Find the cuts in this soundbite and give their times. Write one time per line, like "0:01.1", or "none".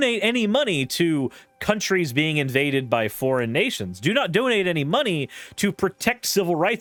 none